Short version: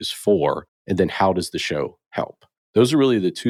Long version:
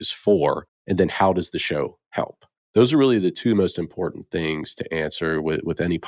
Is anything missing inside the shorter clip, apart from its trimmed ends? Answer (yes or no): no